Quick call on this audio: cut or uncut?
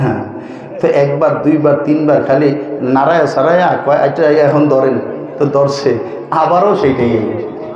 uncut